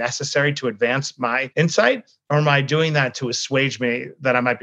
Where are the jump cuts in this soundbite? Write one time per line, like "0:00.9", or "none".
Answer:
0:01.4

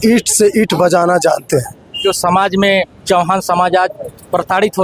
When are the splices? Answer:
0:02.0

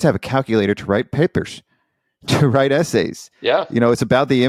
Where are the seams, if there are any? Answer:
none

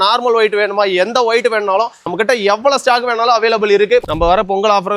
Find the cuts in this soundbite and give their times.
0:02.1
0:04.0

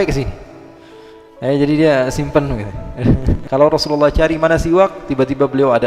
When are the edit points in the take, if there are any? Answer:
0:03.4

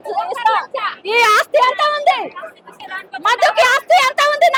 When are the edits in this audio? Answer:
none

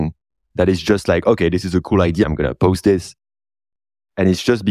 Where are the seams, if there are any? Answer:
0:02.2

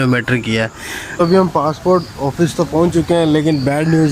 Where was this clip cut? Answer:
0:01.2

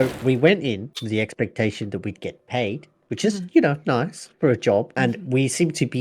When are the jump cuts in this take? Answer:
0:00.9
0:04.9

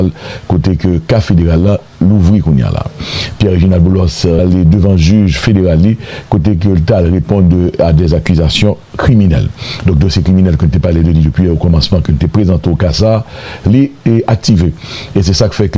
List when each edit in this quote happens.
0:04.4

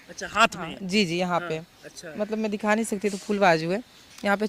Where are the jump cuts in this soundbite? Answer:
none

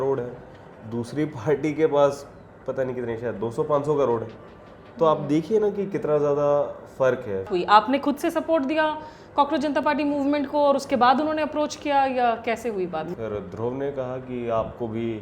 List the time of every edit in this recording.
0:07.5
0:13.1

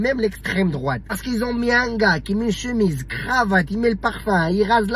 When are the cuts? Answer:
0:01.2

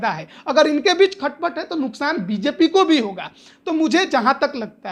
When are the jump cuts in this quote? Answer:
none

